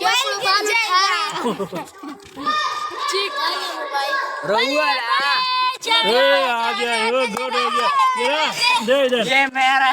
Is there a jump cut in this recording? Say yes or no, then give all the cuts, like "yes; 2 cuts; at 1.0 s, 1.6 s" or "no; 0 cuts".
no; 0 cuts